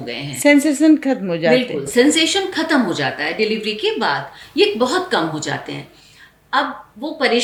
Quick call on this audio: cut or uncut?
uncut